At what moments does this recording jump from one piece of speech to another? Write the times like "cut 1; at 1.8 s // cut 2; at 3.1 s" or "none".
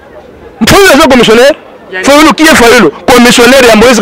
none